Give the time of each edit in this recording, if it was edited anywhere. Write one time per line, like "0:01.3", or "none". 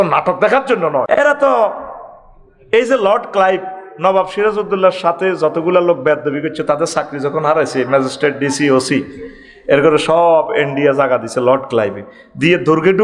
0:01.2